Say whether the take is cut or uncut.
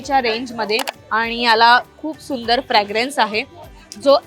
cut